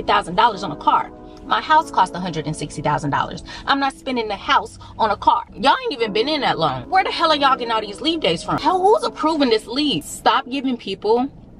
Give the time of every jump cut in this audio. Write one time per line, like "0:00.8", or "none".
0:05.5
0:06.8
0:08.6
0:10.1